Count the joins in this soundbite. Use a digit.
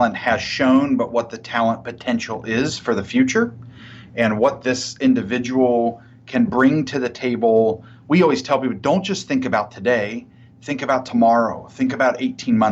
0